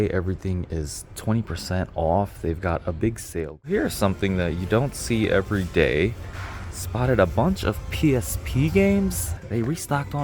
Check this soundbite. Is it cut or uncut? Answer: cut